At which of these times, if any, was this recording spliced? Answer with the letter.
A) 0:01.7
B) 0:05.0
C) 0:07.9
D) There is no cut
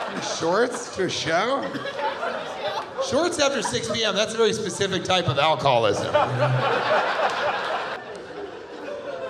C